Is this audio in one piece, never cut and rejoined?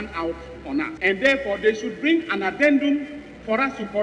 no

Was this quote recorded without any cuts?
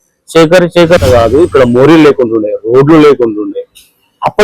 no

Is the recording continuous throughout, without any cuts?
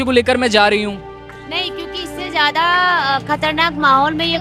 yes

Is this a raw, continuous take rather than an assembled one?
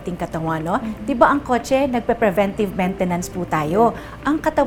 yes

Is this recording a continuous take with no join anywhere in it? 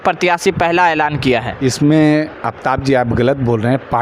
no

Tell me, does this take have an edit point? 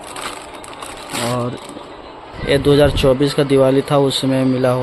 yes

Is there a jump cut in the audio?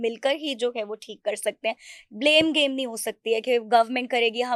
no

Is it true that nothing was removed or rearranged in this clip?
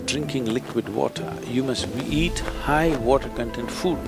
yes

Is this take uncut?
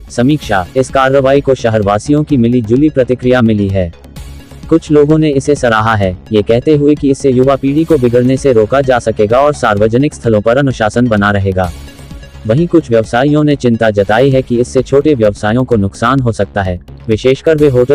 yes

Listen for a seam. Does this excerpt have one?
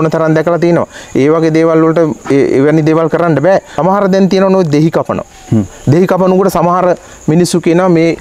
yes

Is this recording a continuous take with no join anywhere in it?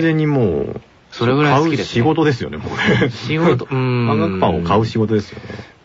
no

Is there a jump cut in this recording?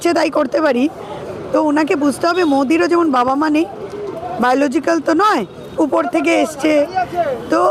no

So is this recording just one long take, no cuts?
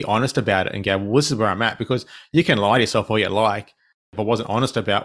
no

